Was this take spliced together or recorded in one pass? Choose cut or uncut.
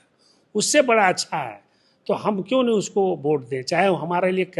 uncut